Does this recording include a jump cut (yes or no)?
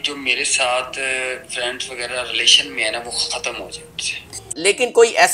no